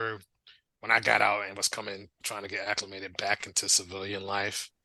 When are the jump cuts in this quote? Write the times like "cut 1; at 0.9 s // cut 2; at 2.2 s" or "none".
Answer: none